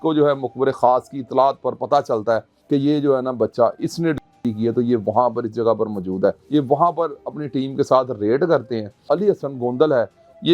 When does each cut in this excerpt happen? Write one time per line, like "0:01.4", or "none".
0:02.5
0:06.4
0:09.0

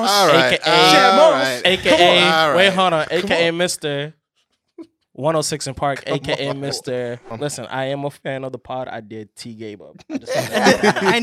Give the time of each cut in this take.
0:07.3

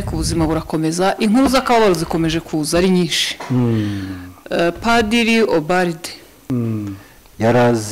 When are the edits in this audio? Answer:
0:06.4

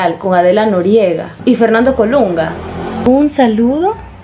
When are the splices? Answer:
0:01.3
0:03.0

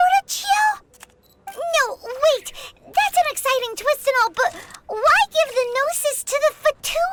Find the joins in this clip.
none

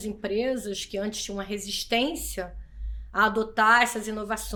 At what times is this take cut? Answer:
none

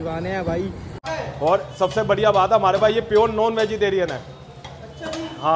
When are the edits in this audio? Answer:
0:01.0

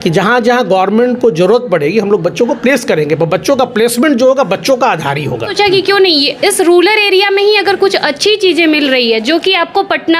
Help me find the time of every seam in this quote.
0:05.5

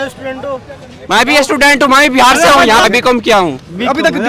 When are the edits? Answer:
0:02.8

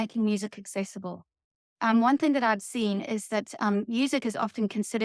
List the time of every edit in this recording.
none

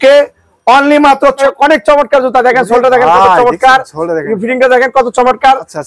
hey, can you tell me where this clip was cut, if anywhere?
0:01.4

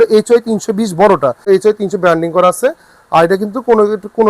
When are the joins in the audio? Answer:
0:01.4

